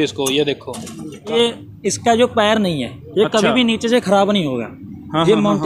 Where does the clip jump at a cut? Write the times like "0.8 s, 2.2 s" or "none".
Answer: 1.3 s